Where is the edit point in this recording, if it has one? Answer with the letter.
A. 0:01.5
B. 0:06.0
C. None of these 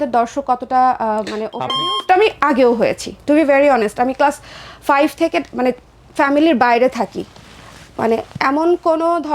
A